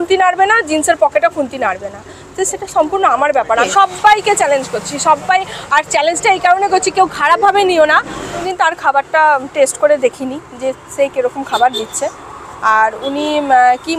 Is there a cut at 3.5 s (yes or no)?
yes